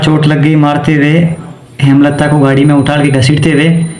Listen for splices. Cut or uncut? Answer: uncut